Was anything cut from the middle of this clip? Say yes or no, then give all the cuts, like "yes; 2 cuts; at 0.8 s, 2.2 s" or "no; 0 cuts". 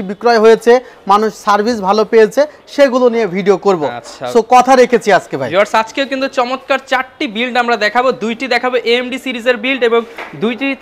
no; 0 cuts